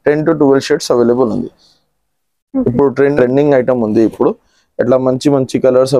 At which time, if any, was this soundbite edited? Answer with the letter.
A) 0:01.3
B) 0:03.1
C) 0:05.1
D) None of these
B